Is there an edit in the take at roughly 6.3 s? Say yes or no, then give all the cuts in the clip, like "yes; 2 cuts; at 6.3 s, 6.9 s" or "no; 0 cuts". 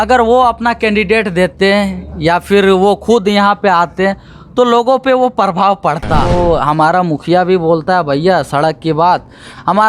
yes; 1 cut; at 6.3 s